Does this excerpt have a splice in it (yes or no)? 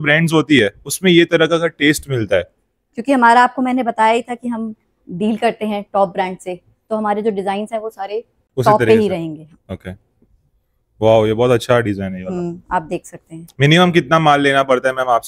no